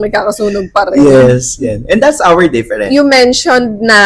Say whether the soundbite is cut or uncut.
uncut